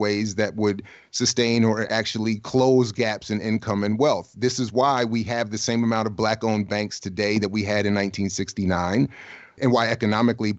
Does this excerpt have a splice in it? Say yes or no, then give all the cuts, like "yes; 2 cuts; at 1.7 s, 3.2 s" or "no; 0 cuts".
no; 0 cuts